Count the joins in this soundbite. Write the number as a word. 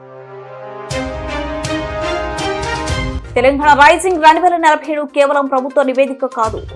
one